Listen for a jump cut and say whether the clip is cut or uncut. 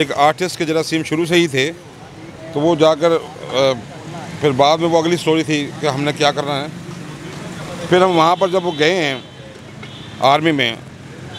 uncut